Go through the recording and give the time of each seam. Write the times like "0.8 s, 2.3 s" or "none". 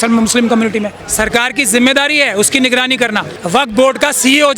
1.0 s, 3.4 s